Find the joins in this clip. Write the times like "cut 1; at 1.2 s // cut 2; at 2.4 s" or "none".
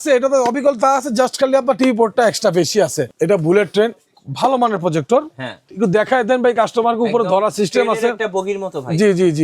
cut 1; at 3.1 s